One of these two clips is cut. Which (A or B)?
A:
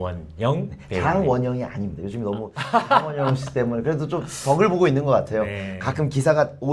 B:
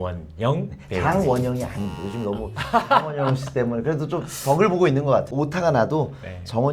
B